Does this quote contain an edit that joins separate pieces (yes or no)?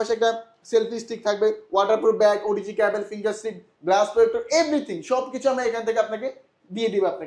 no